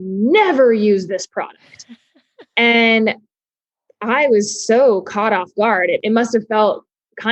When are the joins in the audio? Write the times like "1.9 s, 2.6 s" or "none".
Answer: 6.0 s